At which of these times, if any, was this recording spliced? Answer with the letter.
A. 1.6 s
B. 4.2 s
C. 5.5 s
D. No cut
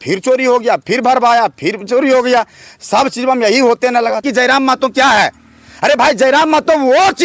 B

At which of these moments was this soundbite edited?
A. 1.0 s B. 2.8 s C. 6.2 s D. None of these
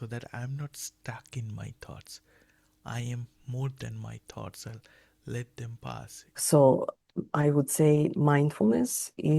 C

